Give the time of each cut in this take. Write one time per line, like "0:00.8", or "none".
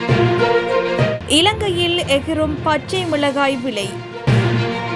0:01.2

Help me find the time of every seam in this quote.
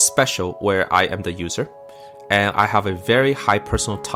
none

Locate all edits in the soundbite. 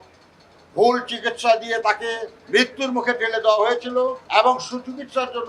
0:02.3
0:04.2

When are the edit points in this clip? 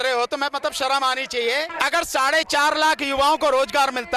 0:01.7

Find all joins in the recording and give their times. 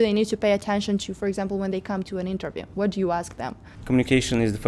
0:03.7

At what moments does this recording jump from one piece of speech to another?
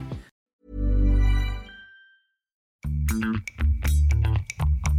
0:02.7

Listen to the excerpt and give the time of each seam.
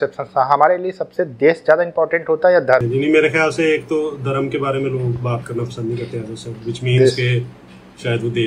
0:02.9

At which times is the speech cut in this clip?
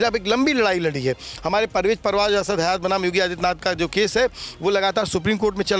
none

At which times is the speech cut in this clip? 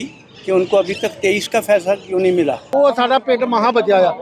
0:02.6

